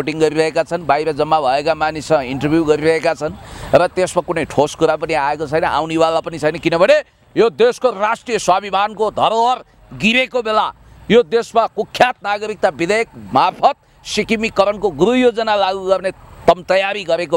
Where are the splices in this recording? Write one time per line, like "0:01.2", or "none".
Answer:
none